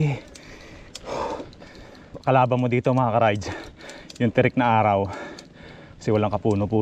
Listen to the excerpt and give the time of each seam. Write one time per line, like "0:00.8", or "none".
0:02.2